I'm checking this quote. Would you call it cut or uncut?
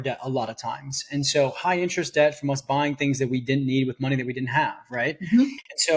uncut